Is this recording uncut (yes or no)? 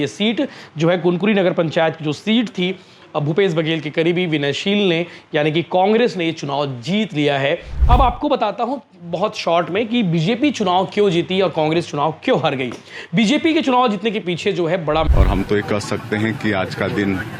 no